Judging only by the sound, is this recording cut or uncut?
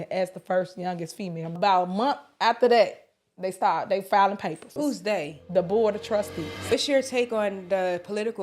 cut